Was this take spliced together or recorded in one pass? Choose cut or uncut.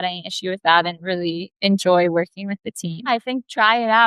cut